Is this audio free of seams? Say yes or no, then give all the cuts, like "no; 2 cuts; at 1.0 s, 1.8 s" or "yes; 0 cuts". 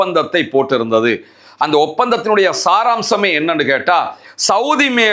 yes; 0 cuts